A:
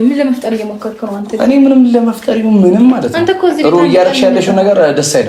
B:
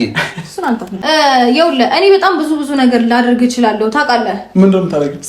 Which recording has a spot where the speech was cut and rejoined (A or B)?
B